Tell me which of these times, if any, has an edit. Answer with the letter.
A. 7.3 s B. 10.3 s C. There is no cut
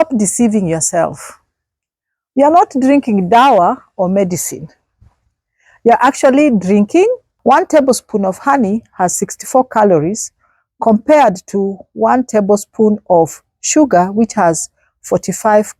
A